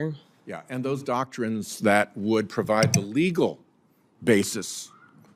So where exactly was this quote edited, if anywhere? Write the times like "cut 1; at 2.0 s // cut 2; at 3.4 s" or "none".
none